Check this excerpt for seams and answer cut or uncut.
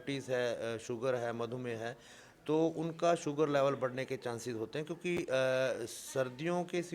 uncut